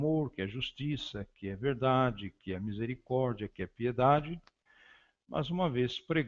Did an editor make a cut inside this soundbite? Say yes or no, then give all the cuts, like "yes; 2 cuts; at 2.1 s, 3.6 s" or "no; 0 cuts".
no; 0 cuts